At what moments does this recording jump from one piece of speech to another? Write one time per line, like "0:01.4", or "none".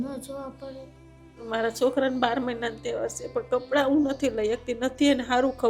0:01.4